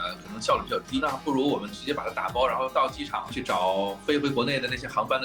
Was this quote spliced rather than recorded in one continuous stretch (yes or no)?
yes